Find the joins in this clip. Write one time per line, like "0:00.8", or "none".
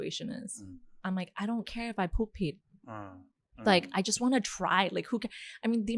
0:01.0